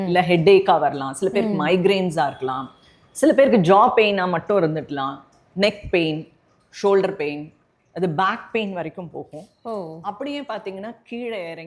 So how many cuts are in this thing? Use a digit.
0